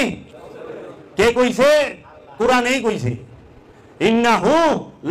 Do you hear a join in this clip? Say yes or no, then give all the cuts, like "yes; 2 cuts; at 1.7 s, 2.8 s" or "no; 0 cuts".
no; 0 cuts